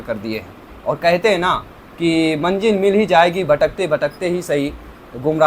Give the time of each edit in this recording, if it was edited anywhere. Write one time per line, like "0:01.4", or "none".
none